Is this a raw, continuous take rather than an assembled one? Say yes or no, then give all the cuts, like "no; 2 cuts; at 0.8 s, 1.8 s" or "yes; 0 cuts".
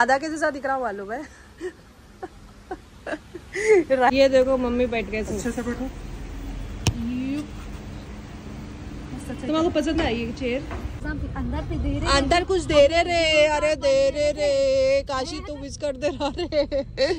no; 2 cuts; at 4.1 s, 11.0 s